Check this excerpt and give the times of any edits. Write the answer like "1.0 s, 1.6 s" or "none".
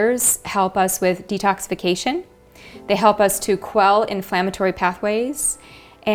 none